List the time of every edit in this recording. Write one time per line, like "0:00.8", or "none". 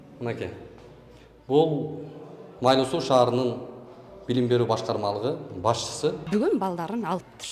0:06.2